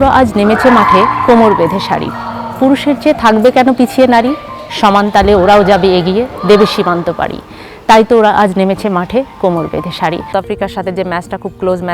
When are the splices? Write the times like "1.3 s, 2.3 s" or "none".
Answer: 10.3 s